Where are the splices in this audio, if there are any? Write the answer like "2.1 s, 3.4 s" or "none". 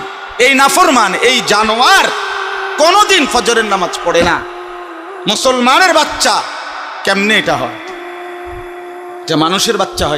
7.7 s, 9.2 s